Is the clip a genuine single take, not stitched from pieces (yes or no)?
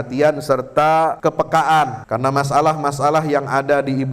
no